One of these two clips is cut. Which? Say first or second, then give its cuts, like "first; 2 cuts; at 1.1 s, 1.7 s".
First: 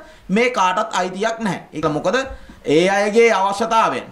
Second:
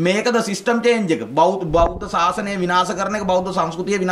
first; 1 cut; at 1.8 s